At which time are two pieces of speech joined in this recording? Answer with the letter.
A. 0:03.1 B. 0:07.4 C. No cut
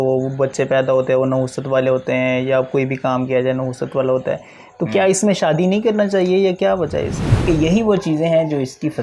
B